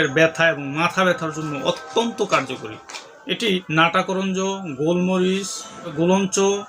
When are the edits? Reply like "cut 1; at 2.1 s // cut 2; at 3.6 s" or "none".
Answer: cut 1; at 3.7 s // cut 2; at 5.9 s